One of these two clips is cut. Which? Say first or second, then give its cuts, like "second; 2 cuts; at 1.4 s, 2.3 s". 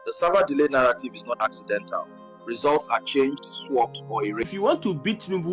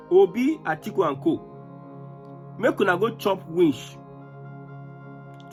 first; 1 cut; at 4.5 s